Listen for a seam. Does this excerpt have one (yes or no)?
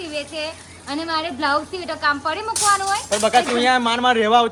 no